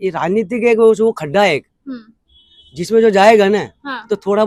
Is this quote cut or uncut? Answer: uncut